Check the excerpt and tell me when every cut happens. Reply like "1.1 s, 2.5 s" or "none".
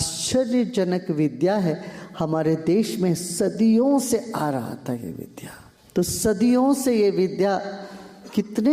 none